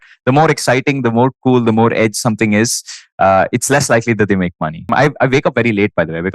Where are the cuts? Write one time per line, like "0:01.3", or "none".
0:04.9